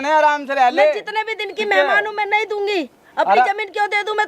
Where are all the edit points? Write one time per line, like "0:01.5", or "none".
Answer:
none